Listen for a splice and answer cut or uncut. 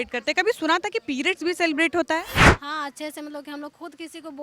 cut